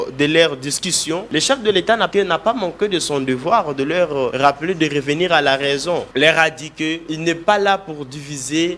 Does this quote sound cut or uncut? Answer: cut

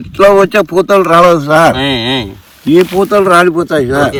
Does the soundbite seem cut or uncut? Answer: uncut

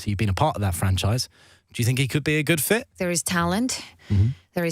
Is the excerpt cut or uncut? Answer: cut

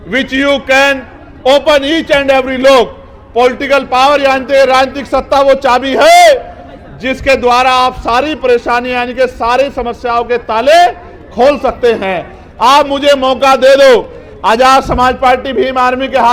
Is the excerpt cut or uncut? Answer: uncut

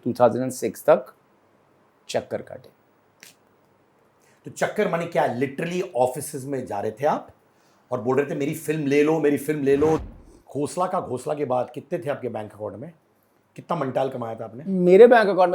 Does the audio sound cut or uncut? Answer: cut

